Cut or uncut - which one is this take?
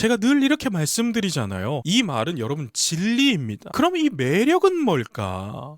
cut